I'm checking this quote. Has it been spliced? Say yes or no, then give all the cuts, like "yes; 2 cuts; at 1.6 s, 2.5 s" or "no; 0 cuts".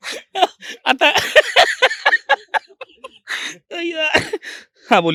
no; 0 cuts